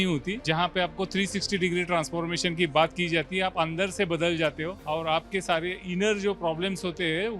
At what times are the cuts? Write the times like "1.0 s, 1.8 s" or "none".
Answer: none